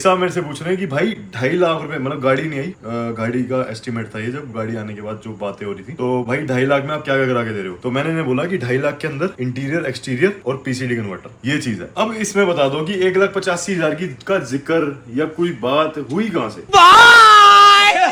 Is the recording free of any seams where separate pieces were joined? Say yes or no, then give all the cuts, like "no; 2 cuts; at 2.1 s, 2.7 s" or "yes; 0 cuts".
yes; 0 cuts